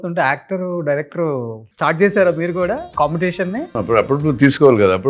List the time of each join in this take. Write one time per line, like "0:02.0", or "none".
0:01.6
0:02.9
0:03.7